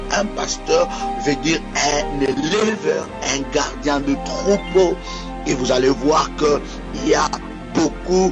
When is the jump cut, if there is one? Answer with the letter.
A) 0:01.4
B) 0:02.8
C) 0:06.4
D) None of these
D